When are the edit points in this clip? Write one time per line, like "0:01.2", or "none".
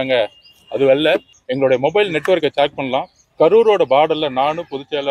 0:01.4
0:03.2

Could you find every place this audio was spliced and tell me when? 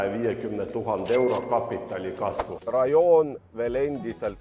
0:02.6

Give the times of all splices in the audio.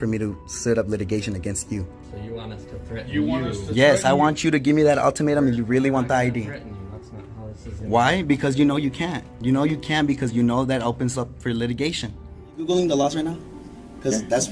0:12.6

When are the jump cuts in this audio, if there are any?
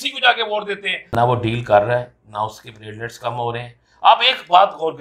0:01.1

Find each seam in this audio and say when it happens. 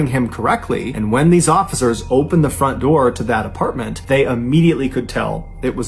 0:00.9
0:03.9

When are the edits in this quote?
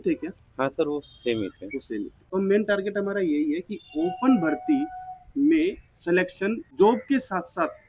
0:02.3
0:06.6

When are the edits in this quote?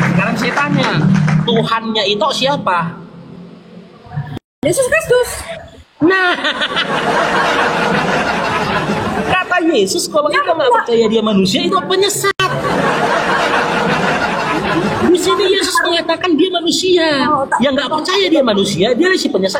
0:12.4
0:14.5

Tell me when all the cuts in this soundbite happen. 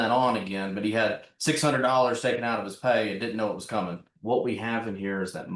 0:04.1

